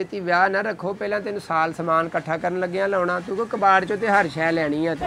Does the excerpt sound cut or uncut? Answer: uncut